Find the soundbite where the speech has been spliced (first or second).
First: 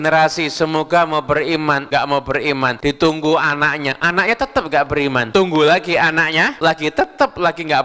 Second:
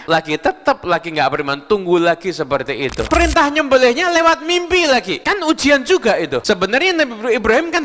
second